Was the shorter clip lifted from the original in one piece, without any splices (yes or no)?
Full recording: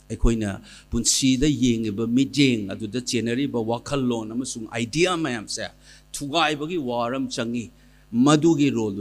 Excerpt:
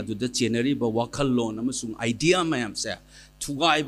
yes